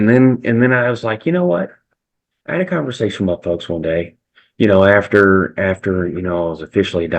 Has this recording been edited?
no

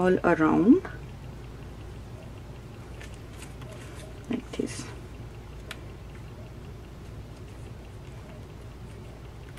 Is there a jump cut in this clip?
no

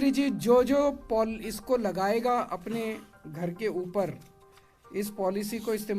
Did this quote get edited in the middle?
no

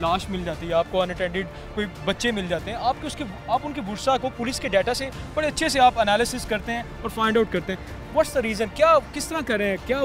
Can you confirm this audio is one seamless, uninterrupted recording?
yes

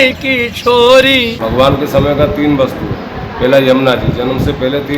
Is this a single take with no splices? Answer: no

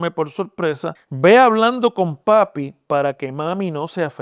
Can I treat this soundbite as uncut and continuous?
no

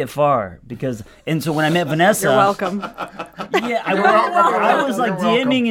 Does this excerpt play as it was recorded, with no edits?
yes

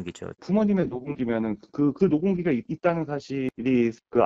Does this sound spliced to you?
no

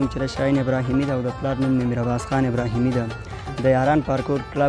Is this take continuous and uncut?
yes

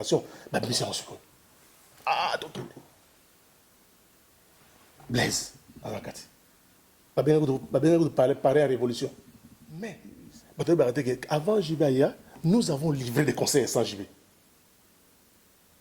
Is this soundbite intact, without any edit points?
no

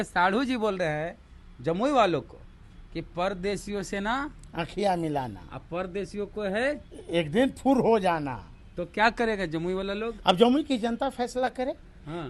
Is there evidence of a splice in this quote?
no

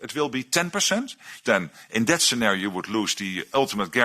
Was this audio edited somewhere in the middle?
yes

